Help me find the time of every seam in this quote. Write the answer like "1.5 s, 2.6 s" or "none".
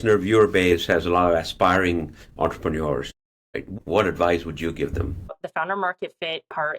3.4 s, 5.4 s